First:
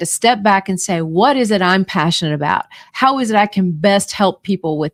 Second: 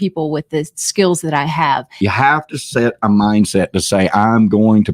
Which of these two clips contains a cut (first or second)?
second